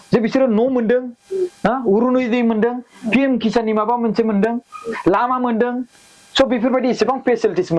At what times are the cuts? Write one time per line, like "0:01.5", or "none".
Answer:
none

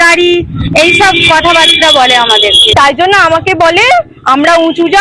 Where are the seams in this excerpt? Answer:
0:02.6

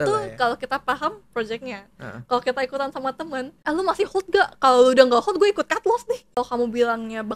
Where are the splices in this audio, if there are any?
0:03.5
0:06.3

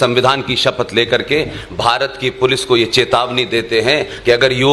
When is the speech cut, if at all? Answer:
none

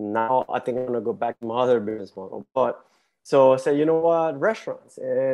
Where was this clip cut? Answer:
none

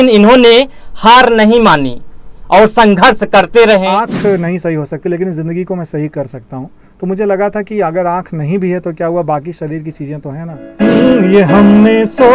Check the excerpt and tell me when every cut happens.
0:03.9
0:10.6

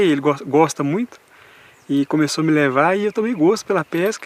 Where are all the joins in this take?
none

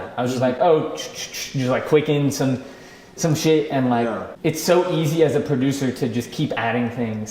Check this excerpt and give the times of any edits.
0:04.2

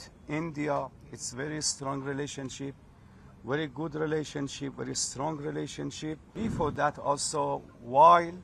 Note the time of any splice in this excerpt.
0:06.3

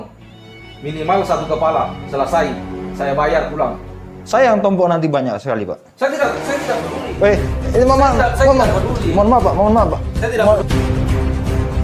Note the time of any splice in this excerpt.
0:10.6

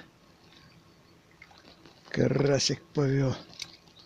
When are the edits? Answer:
0:01.6

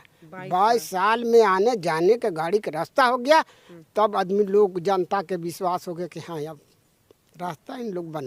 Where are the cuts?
none

